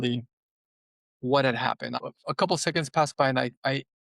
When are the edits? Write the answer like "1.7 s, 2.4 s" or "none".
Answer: 2.0 s